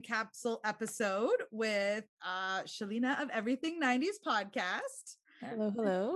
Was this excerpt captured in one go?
yes; 0 cuts

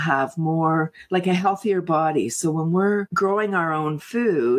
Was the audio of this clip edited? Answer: no; 0 cuts

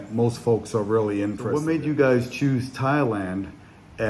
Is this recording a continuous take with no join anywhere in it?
no; 1 cut; at 1.5 s

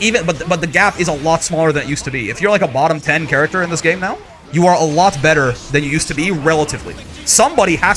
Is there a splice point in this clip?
no; 0 cuts

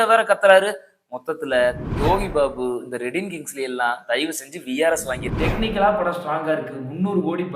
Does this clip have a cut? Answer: yes; 2 cuts; at 1.9 s, 5.3 s

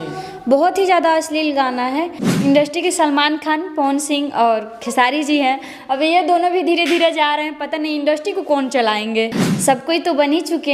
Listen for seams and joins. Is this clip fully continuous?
no; 2 cuts; at 2.2 s, 9.4 s

